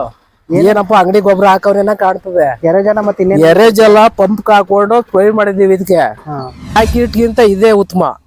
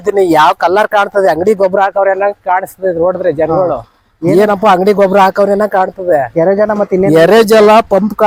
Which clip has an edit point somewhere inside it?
first; 1 cut; at 6.8 s

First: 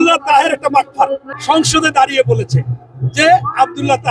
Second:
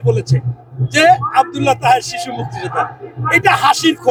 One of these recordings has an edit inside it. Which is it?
first; 1 cut; at 1.3 s

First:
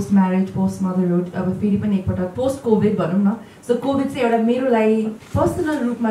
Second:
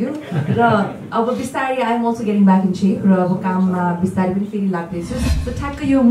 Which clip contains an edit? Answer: second; 1 cut; at 5.2 s

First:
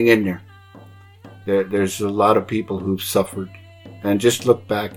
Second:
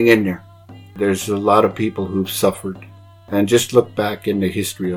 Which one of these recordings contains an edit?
second; 1 cut; at 1.0 s

